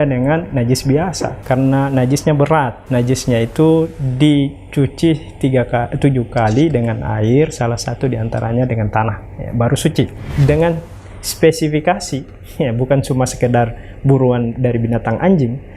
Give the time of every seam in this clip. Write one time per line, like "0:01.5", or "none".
0:01.3
0:02.8
0:10.3